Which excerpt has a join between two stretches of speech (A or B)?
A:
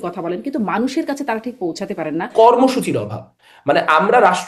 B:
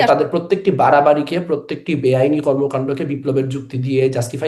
A